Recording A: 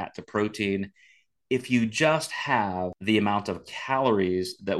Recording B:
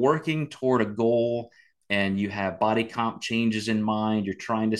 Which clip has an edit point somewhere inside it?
A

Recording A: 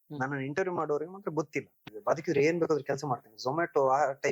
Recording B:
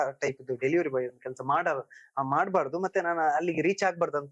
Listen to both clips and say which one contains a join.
A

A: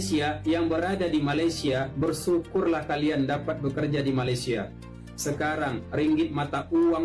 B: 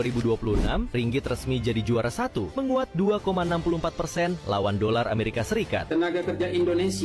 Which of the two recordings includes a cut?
B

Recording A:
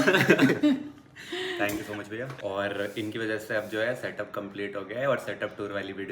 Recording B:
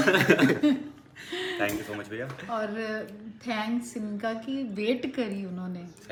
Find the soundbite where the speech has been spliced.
A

